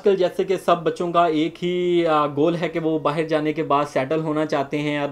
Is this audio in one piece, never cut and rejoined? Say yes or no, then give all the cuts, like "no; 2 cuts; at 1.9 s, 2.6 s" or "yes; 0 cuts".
yes; 0 cuts